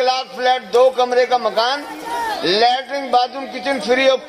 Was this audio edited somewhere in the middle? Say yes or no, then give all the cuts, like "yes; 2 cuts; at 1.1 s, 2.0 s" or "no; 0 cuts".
no; 0 cuts